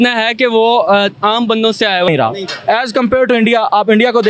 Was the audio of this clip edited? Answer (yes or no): yes